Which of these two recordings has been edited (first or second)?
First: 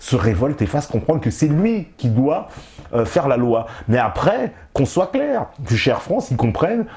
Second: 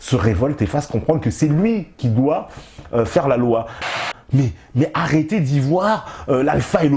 second